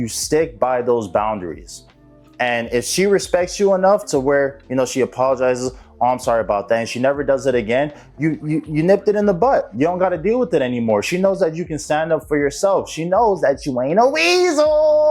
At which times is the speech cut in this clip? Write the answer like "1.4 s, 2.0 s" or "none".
none